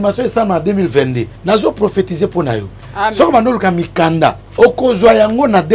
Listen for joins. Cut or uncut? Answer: cut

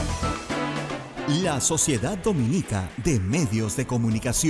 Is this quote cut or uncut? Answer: cut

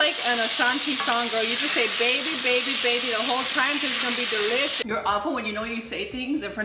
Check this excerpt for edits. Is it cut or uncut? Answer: cut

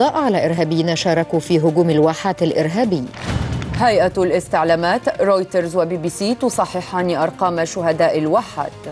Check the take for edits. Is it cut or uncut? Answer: cut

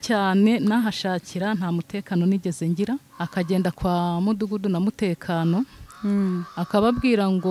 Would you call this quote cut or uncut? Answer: cut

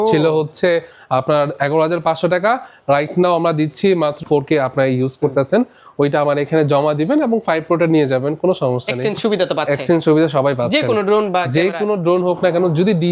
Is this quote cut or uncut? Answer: cut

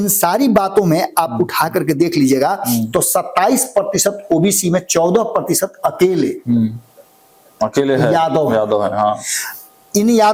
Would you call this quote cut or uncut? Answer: uncut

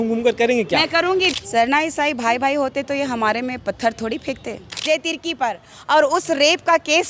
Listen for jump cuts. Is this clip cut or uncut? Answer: cut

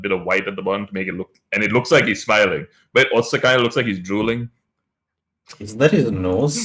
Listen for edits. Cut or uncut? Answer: uncut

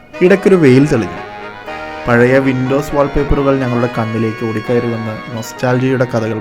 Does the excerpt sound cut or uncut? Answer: uncut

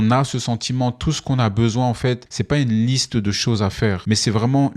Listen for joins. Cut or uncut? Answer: cut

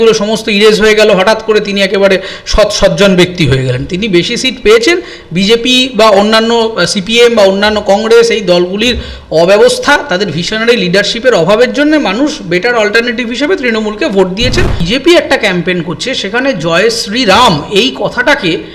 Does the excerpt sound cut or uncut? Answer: cut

